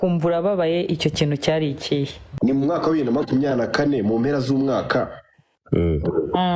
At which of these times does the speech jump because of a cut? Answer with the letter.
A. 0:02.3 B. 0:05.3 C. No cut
A